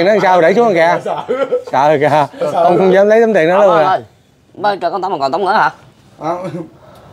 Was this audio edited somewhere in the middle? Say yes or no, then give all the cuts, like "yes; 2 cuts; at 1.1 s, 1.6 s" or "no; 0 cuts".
no; 0 cuts